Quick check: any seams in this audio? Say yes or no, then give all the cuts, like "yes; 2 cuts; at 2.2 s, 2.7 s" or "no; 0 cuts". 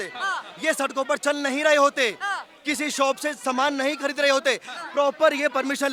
no; 0 cuts